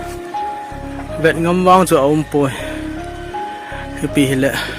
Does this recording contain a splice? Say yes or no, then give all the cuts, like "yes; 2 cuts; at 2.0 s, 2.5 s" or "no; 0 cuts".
yes; 3 cuts; at 1.2 s, 2.6 s, 4.0 s